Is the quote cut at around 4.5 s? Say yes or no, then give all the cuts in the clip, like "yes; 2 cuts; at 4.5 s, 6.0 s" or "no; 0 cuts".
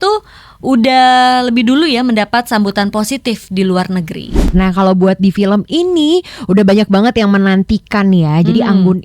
yes; 1 cut; at 4.5 s